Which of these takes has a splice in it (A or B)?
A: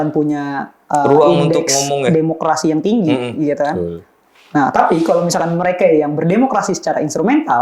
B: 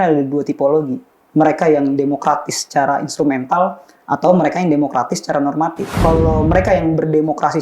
B